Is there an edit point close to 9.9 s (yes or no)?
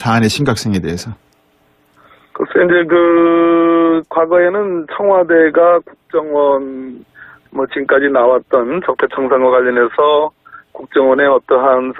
yes